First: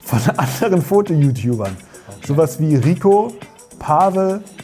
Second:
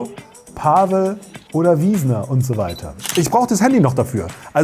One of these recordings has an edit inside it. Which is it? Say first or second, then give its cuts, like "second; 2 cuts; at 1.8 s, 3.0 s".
second; 1 cut; at 3.1 s